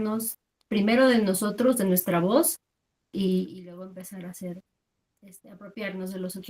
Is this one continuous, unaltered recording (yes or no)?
yes